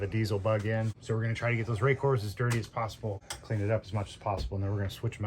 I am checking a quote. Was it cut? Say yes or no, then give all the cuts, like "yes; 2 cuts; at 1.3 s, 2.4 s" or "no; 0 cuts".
yes; 2 cuts; at 1.0 s, 3.3 s